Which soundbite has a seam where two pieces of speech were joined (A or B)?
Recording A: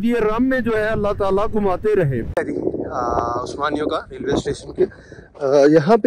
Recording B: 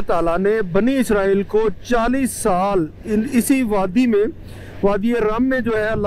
A